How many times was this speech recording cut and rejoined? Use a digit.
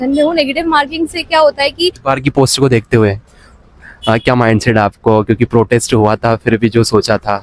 1